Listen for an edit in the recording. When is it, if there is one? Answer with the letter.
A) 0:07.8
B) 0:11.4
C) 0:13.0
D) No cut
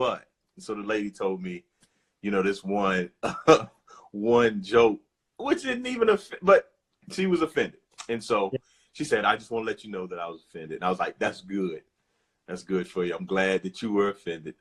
D